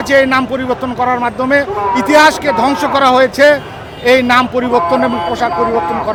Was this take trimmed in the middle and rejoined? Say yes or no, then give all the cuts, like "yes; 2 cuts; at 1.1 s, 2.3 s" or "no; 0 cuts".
no; 0 cuts